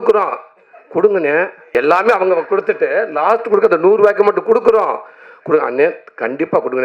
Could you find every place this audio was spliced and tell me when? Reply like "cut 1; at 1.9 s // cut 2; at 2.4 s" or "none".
cut 1; at 1.6 s